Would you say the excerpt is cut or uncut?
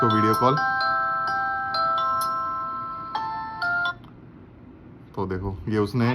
uncut